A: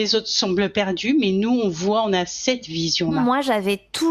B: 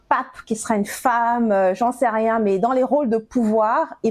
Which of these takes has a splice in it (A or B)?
A